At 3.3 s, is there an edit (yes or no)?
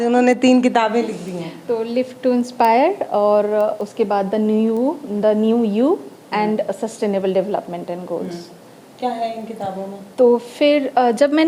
no